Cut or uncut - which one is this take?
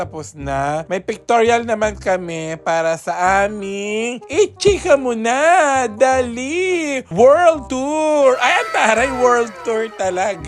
uncut